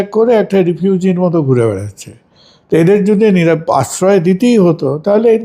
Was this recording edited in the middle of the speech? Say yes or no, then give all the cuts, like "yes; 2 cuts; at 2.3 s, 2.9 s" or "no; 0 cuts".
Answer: no; 0 cuts